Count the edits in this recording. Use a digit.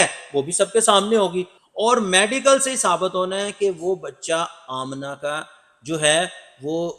0